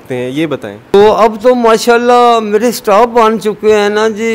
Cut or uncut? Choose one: cut